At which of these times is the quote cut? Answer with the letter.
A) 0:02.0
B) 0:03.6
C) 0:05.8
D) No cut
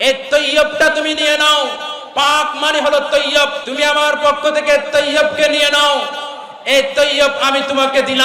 B